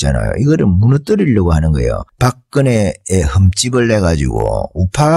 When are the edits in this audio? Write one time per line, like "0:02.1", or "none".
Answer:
none